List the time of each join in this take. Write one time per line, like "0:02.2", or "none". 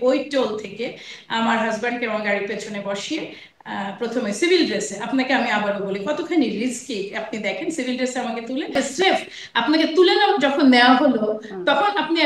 0:08.8